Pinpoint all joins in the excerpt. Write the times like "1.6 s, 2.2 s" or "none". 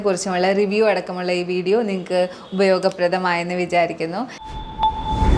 4.4 s

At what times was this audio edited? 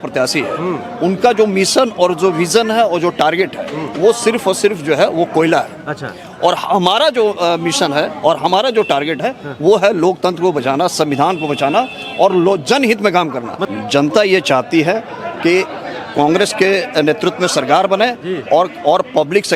none

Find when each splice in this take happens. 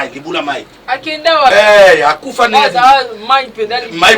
1.5 s

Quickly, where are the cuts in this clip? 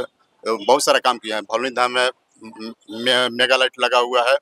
none

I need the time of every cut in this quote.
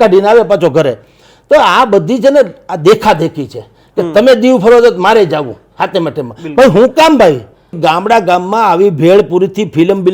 7.8 s

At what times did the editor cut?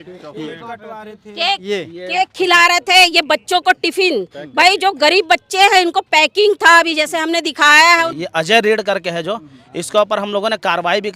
8.1 s

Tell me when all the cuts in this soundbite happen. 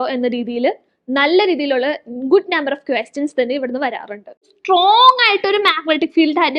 4.6 s

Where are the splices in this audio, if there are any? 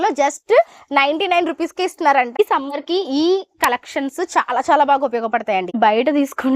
2.4 s, 5.8 s

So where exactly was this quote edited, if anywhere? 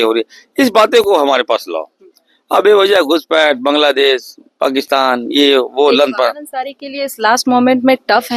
none

